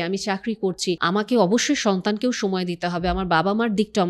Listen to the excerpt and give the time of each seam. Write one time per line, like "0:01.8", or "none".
0:01.0